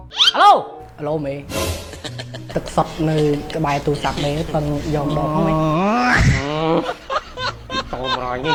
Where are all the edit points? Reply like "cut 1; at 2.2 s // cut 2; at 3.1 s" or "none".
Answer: none